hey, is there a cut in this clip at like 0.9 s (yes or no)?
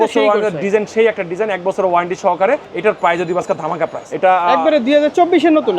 no